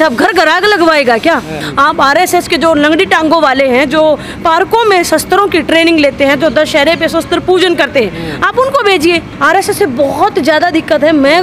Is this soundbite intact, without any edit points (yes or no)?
no